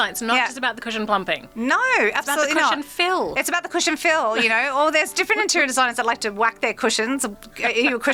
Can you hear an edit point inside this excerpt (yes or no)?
no